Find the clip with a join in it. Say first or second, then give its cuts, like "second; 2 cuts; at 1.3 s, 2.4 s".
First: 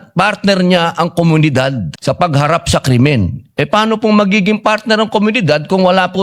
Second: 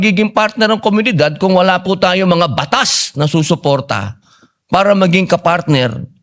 first; 1 cut; at 1.9 s